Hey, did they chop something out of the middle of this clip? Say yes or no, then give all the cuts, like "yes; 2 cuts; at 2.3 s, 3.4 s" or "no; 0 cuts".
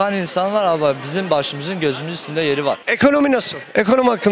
yes; 1 cut; at 2.8 s